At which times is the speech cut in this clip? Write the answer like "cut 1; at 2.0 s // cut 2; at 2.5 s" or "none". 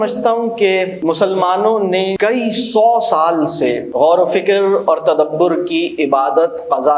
cut 1; at 0.9 s // cut 2; at 2.1 s // cut 3; at 3.8 s

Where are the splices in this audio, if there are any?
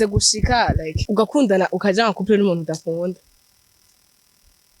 cut 1; at 0.9 s

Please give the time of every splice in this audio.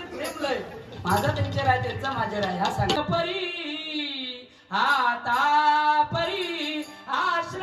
cut 1; at 3.0 s

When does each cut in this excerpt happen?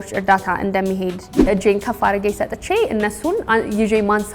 cut 1; at 1.5 s

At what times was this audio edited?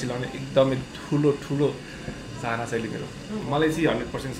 cut 1; at 3.3 s

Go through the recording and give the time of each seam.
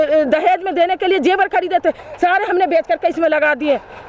none

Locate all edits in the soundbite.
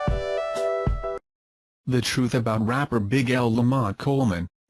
none

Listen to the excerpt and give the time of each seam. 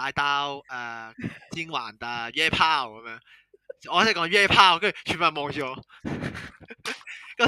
none

